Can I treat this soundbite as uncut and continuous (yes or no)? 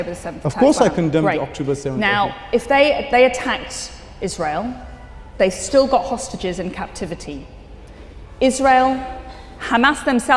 yes